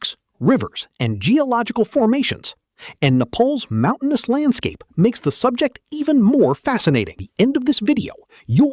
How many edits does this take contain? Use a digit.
1